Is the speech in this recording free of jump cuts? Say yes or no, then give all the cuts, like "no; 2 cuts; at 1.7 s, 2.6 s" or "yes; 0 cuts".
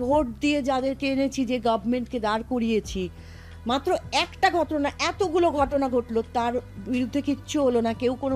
yes; 0 cuts